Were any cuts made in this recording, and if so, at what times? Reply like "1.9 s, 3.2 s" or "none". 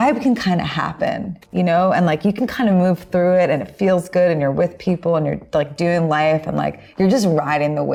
none